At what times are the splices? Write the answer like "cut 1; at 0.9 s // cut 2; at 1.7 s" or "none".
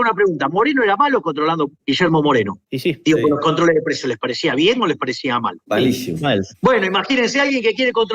cut 1; at 1.8 s // cut 2; at 5.6 s